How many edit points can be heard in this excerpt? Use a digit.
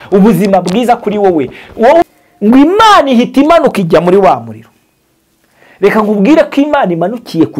1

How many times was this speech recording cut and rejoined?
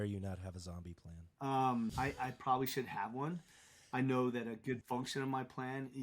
2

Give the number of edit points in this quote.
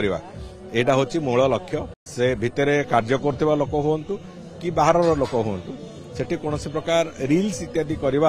1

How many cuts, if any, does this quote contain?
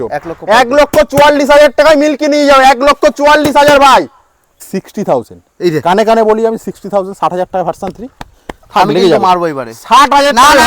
1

